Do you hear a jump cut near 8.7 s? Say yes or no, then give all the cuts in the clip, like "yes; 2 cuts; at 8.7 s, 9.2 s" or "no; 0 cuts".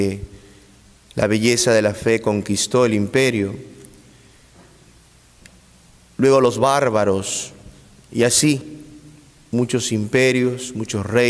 no; 0 cuts